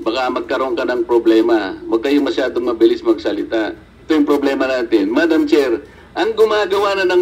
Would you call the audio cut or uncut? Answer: cut